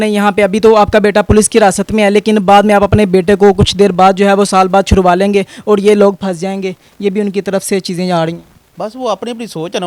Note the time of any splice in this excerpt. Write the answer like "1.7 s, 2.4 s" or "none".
none